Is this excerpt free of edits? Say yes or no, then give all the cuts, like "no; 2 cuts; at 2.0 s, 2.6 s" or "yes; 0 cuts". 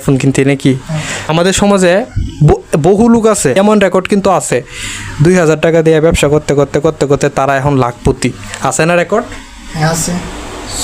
no; 2 cuts; at 1.2 s, 3.6 s